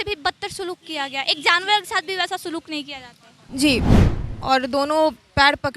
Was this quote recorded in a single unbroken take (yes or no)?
no